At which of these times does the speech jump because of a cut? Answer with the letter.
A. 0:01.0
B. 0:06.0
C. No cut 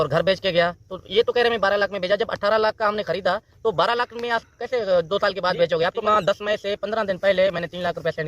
B